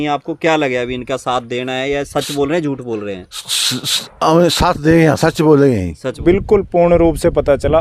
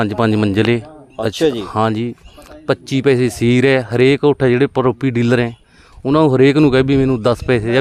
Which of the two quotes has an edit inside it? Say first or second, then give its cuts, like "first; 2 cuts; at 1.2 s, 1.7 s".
first; 1 cut; at 6.2 s